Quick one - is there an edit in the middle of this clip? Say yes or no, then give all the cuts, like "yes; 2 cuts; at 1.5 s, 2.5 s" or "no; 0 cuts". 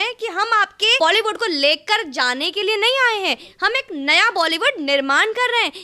yes; 1 cut; at 1.0 s